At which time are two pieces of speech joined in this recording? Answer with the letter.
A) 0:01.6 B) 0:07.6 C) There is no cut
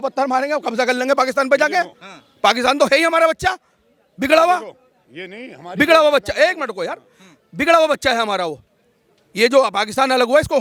C